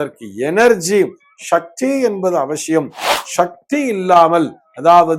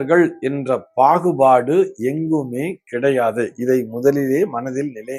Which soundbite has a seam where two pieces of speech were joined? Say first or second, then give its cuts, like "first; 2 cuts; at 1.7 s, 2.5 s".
first; 1 cut; at 3.0 s